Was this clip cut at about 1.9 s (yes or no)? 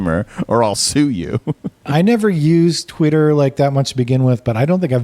yes